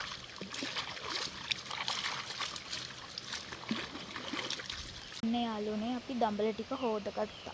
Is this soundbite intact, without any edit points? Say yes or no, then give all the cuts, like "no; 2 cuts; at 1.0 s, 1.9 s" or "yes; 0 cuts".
no; 1 cut; at 5.1 s